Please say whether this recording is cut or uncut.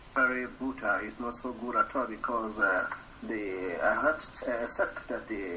cut